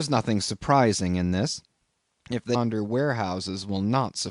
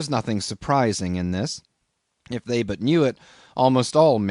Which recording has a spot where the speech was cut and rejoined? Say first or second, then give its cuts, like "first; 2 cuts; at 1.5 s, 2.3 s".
second; 1 cut; at 2.5 s